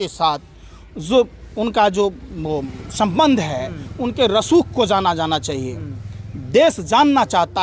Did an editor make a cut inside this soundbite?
no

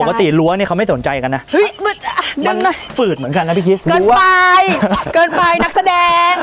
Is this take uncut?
yes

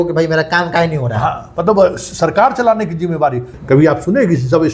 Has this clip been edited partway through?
yes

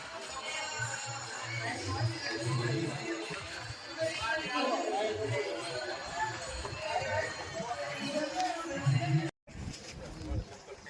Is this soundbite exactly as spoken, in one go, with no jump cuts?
no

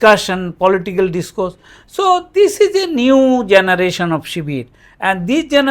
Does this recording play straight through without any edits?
yes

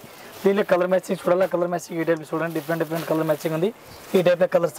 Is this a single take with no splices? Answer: yes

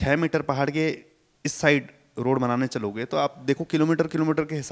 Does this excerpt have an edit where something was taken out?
no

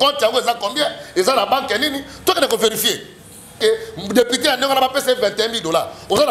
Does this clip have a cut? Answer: yes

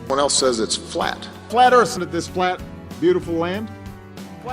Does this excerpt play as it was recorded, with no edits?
no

